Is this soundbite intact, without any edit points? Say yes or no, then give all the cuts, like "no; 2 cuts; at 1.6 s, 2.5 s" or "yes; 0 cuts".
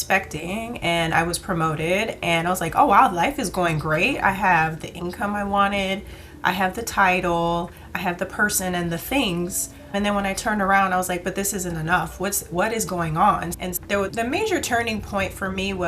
no; 1 cut; at 13.5 s